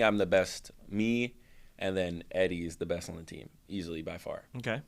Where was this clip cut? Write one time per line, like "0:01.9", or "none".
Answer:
none